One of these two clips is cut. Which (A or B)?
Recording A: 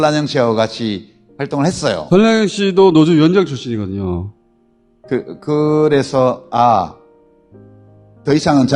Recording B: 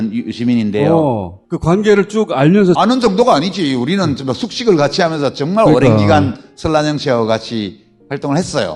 A